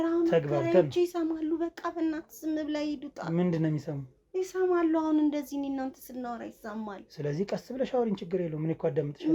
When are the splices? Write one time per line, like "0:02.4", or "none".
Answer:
none